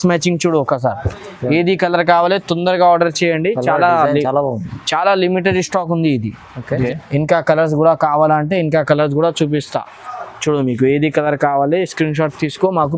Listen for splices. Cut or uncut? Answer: cut